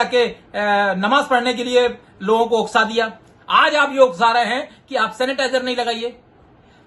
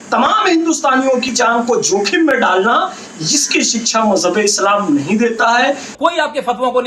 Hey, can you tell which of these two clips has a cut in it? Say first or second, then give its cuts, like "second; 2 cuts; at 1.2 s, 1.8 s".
second; 1 cut; at 6.0 s